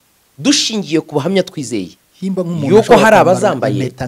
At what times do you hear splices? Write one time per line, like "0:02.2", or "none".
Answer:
none